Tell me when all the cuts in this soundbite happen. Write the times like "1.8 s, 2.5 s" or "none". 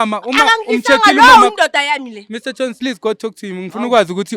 2.8 s